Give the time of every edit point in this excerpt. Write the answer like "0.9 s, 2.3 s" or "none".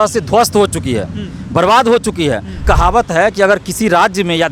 2.6 s